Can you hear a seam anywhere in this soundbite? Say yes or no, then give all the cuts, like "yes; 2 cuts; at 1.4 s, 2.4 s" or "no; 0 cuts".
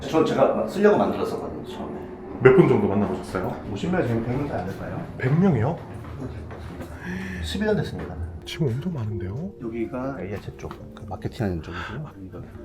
yes; 1 cut; at 8.3 s